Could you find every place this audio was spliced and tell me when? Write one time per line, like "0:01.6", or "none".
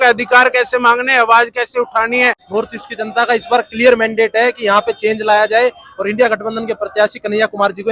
0:02.4